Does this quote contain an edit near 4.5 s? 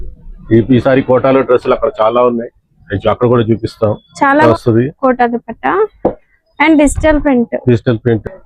yes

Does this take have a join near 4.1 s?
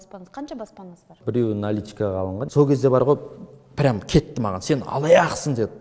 no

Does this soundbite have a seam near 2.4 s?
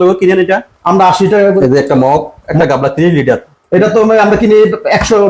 yes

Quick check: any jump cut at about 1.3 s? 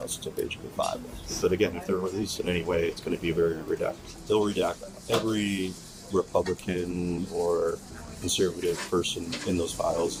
no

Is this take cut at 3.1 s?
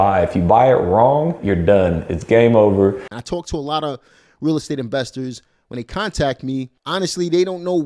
yes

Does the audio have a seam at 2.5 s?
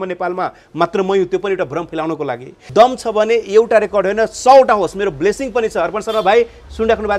yes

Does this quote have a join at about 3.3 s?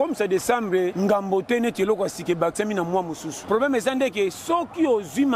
yes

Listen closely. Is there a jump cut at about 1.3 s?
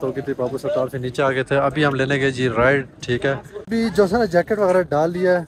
no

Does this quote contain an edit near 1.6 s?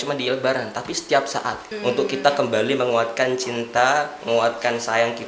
yes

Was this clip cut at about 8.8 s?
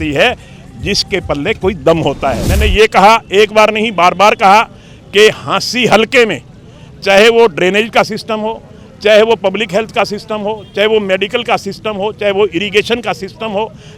no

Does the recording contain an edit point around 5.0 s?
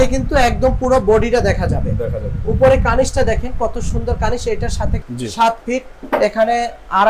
yes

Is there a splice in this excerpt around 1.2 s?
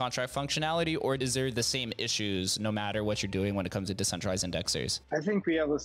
yes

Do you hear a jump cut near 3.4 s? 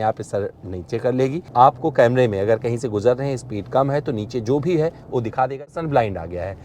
no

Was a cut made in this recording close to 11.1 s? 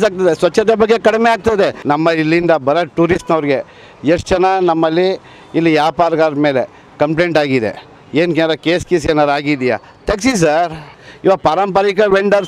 yes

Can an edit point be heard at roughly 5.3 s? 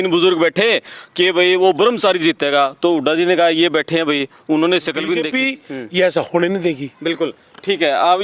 yes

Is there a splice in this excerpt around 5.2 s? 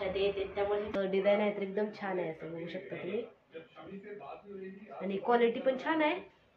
no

